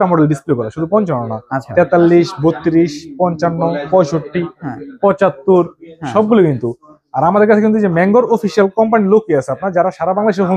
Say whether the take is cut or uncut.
uncut